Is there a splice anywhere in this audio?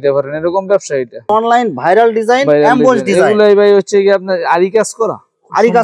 yes; 1 cut; at 1.3 s

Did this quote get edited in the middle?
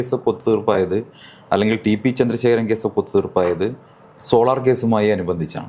no; 0 cuts

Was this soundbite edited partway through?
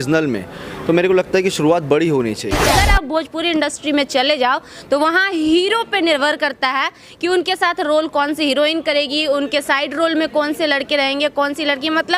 yes; 1 cut; at 2.6 s

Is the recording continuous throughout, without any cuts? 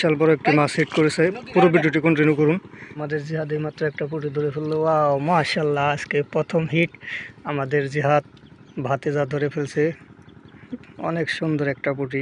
no; 1 cut; at 2.8 s

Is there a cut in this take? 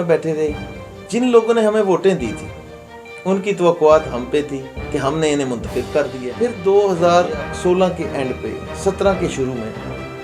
yes; 1 cut; at 6.2 s

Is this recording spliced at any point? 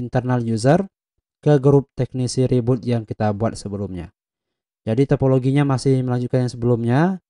no; 0 cuts

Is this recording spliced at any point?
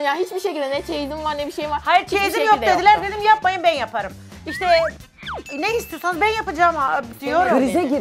yes; 2 cuts; at 5.1 s, 7.1 s

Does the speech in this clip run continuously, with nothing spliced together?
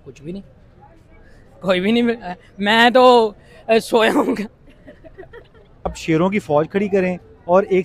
no; 1 cut; at 5.7 s

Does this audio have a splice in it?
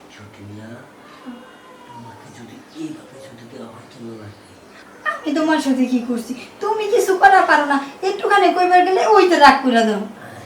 yes; 1 cut; at 4.8 s

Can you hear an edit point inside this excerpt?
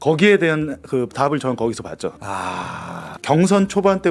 yes; 2 cuts; at 2.1 s, 3.1 s

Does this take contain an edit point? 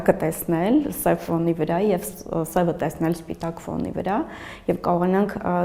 no; 0 cuts

